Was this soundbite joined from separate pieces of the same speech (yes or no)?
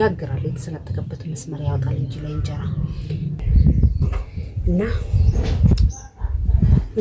yes